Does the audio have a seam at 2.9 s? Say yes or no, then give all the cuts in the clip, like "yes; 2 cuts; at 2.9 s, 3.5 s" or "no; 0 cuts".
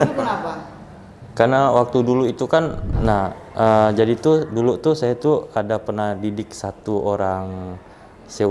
yes; 1 cut; at 2.9 s